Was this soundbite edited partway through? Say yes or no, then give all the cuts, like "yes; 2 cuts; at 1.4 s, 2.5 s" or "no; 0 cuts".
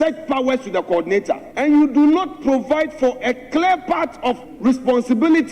yes; 2 cuts; at 1.5 s, 4.5 s